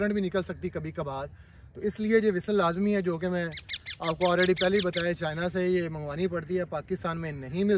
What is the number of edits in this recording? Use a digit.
0